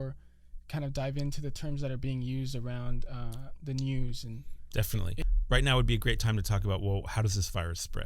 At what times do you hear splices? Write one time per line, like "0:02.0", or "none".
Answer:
0:05.2